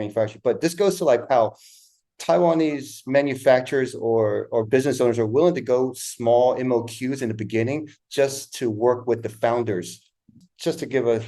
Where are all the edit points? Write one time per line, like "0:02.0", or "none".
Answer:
0:10.4